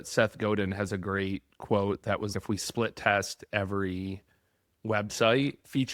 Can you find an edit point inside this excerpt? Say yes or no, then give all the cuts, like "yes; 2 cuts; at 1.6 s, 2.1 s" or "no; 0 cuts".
no; 0 cuts